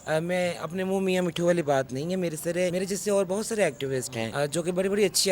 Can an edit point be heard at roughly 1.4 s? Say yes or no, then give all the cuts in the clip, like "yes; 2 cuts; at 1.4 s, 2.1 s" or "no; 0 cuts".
no; 2 cuts; at 2.7 s, 4.2 s